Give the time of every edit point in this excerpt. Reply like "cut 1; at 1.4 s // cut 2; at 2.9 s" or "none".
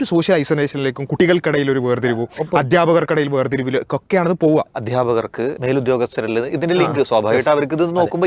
cut 1; at 1.0 s // cut 2; at 4.8 s // cut 3; at 5.6 s